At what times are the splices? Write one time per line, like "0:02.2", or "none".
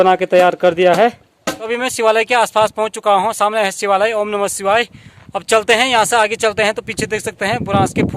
0:01.5